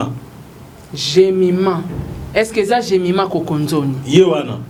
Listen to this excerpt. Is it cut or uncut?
uncut